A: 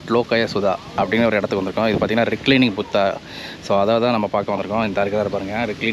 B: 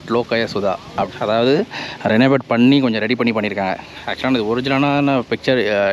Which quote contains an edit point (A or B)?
B